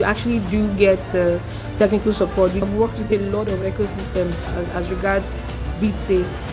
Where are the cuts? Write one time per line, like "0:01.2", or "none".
0:02.6